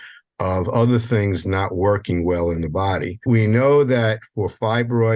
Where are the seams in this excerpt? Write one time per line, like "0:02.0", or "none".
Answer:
0:03.2